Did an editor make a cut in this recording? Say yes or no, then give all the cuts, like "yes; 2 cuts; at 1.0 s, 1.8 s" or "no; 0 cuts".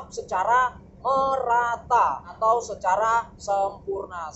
yes; 1 cut; at 2.3 s